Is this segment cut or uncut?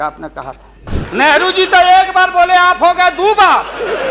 cut